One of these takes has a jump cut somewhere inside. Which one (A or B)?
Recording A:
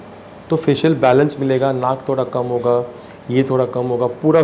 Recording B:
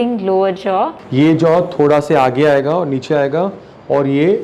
B